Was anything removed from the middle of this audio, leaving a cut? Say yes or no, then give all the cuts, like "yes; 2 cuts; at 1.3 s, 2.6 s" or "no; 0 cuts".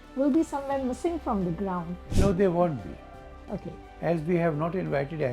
no; 0 cuts